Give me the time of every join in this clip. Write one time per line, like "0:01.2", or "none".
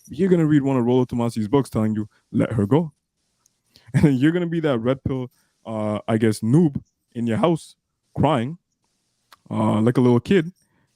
none